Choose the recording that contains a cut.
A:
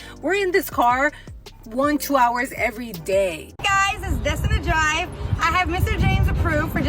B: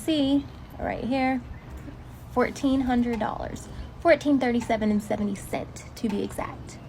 A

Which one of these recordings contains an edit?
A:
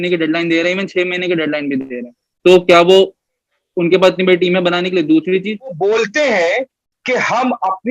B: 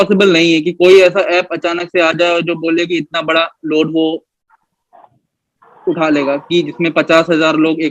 A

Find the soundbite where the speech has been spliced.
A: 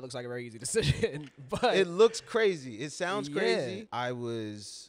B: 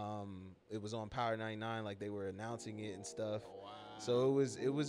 A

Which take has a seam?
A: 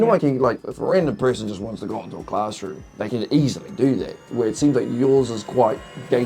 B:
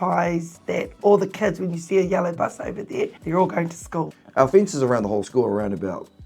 B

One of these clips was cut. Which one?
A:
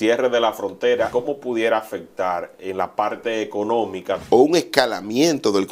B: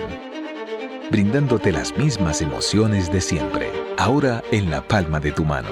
A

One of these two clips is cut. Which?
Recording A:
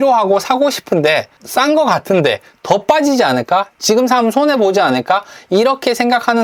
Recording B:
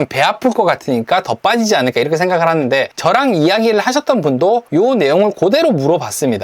B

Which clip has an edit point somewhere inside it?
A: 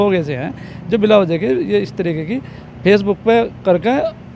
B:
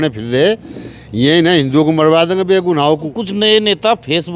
B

